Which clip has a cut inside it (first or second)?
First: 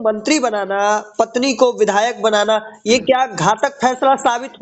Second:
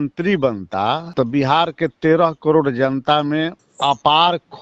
second